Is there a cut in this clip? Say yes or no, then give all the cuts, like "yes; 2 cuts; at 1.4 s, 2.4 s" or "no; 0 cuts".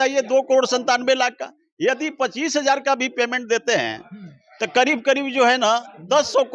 no; 0 cuts